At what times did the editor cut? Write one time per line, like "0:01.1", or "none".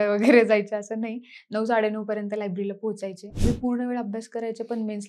0:03.3